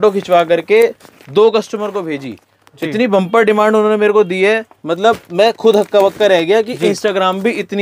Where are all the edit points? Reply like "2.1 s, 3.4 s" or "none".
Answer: none